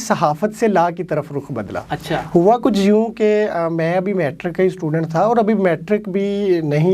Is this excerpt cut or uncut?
uncut